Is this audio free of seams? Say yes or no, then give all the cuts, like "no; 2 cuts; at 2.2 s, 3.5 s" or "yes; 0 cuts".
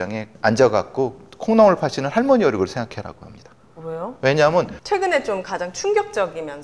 no; 1 cut; at 4.8 s